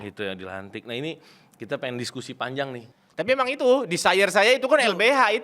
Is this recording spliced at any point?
yes; 1 cut; at 2.9 s

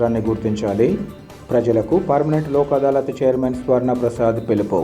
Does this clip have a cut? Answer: no; 0 cuts

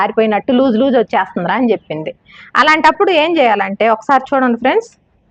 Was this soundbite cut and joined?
no; 0 cuts

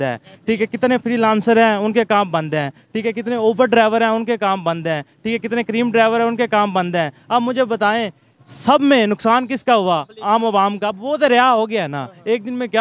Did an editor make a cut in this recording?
no; 0 cuts

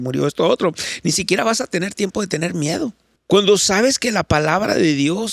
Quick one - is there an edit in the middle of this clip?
yes; 1 cut; at 3.1 s

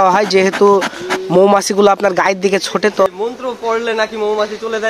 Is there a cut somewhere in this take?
yes; 1 cut; at 3.1 s

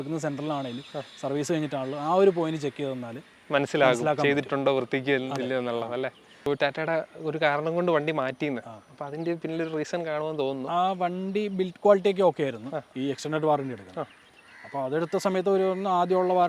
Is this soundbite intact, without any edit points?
no; 2 cuts; at 6.5 s, 12.8 s

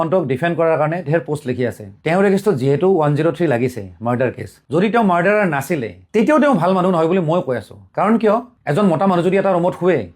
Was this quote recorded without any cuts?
no; 2 cuts; at 2.0 s, 4.6 s

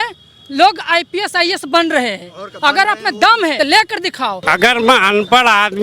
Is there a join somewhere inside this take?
yes; 2 cuts; at 3.6 s, 4.4 s

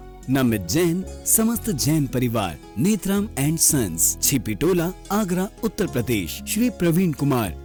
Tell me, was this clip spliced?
no; 0 cuts

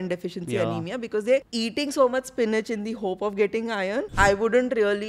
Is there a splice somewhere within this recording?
yes; 2 cuts; at 1.5 s, 4.1 s

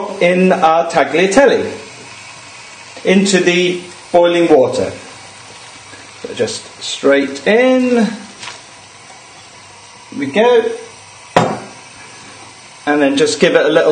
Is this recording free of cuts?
no; 1 cut; at 9.1 s

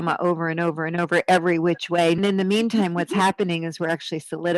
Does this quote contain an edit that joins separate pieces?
yes; 1 cut; at 2.2 s

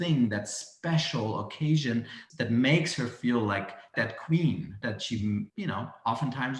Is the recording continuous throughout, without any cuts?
no; 4 cuts; at 2.2 s, 3.9 s, 4.8 s, 5.5 s

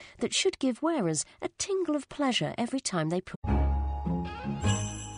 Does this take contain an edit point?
no; 0 cuts

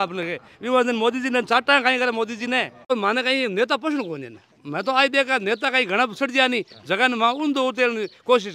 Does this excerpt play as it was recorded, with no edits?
no; 1 cut; at 2.9 s

